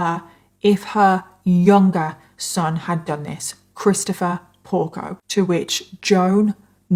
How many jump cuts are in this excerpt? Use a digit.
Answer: 0